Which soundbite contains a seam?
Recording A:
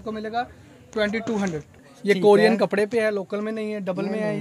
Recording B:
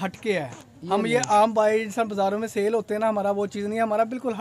A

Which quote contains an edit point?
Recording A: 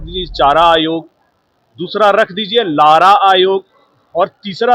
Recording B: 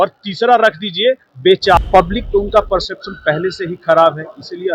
B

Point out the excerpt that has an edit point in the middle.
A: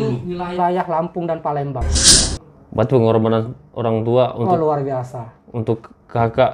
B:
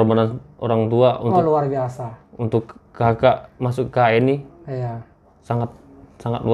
A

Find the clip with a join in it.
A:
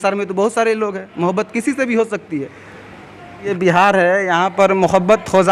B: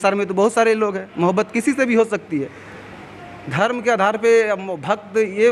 A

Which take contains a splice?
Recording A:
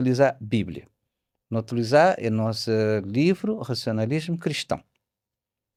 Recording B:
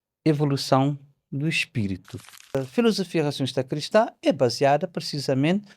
B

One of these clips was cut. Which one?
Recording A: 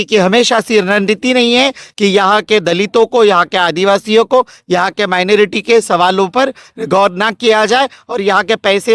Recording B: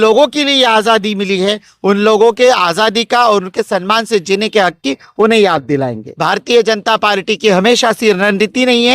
B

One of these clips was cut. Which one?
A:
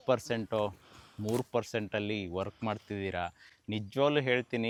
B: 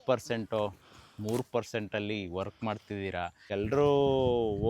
B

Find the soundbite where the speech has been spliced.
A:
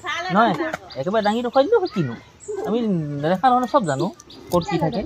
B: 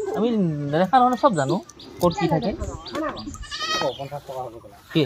B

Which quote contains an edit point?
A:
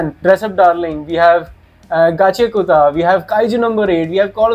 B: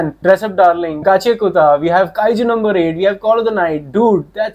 B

